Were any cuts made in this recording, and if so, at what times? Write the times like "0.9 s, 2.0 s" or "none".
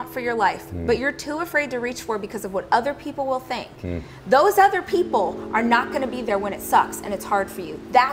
none